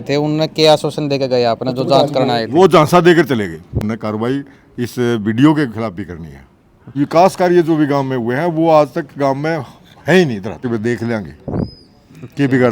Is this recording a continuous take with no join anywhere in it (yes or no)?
no